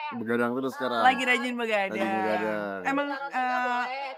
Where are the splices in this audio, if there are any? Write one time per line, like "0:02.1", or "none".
none

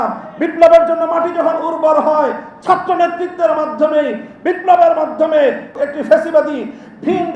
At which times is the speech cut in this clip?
0:05.7

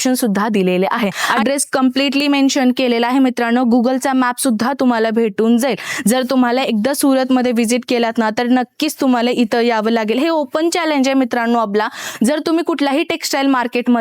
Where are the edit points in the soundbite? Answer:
0:01.2

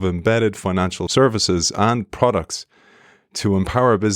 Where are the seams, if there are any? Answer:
0:01.0

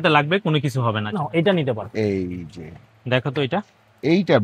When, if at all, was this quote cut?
0:01.0

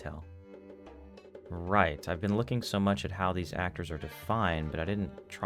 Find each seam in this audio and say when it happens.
0:01.2

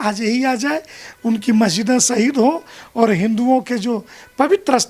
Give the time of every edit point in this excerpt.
none

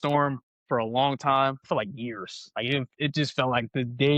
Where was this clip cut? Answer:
0:01.6

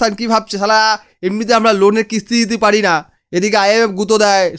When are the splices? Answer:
none

